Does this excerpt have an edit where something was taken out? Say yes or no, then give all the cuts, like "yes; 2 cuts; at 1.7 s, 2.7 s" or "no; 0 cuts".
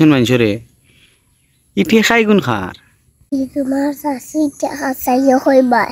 yes; 1 cut; at 3.3 s